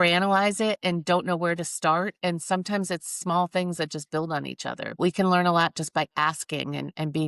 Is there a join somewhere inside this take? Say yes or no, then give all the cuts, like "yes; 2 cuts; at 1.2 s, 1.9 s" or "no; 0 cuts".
yes; 1 cut; at 5.0 s